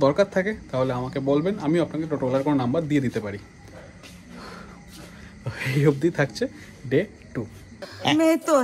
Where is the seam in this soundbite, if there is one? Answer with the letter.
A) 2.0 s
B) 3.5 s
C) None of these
C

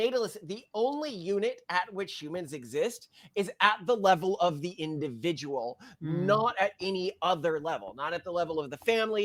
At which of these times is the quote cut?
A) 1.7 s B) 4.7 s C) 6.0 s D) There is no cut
D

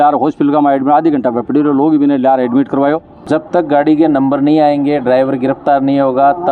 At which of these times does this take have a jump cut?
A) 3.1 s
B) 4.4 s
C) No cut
A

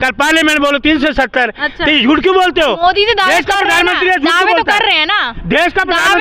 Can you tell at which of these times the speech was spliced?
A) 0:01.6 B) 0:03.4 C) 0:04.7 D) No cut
D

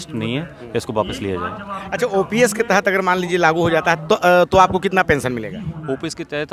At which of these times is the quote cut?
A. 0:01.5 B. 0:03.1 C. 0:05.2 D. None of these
D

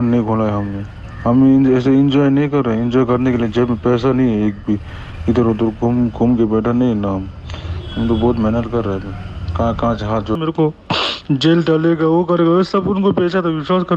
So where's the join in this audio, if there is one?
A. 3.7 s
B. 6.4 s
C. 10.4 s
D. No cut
C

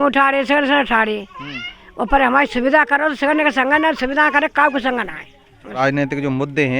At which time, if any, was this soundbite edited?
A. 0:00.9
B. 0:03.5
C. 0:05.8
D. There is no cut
C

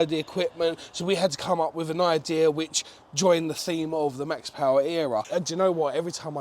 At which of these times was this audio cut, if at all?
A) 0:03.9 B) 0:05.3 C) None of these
B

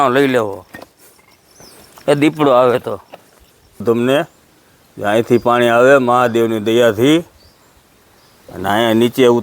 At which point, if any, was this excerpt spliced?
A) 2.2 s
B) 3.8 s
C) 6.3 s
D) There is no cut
B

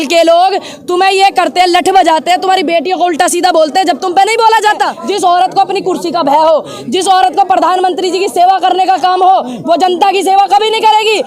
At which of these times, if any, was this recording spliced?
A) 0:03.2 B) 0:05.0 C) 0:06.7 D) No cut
B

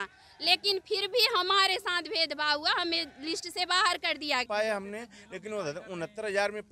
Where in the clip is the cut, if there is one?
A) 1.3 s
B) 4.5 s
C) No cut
B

